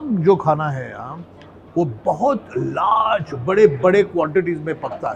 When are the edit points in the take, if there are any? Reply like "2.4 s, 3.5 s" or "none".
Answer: none